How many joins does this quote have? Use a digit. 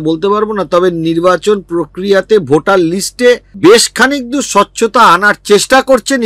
1